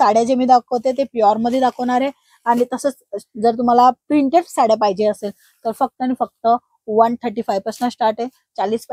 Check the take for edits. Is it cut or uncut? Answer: uncut